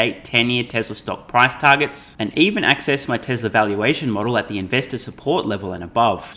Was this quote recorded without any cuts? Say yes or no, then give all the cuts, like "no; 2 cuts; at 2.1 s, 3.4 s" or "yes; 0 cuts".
yes; 0 cuts